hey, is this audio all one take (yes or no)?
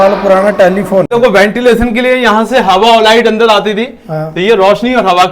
no